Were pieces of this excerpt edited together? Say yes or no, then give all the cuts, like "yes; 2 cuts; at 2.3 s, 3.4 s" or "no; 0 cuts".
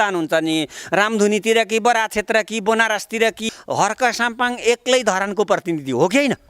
yes; 1 cut; at 3.5 s